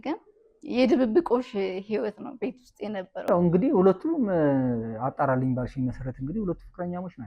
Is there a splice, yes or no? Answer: yes